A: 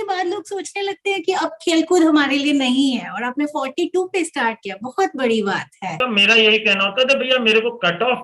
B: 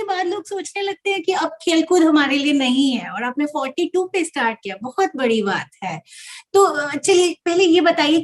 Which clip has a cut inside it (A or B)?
A